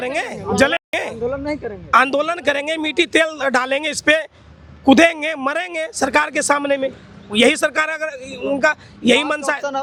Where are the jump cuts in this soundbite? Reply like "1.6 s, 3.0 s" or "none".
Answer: none